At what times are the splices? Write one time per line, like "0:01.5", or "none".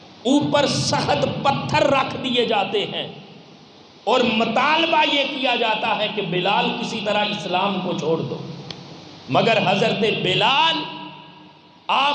none

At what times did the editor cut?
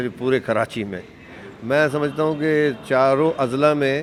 none

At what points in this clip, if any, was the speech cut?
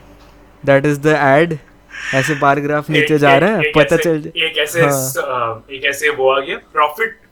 none

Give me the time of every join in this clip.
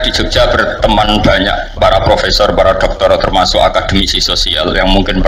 none

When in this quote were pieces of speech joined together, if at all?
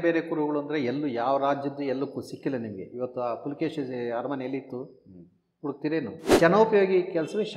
0:06.4

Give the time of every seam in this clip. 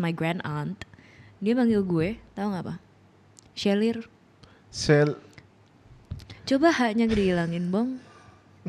none

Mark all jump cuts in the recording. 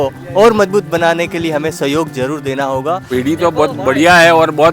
0:03.0

